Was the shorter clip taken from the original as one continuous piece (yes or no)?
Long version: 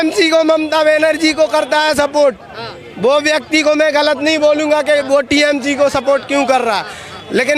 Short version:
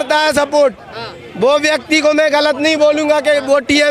yes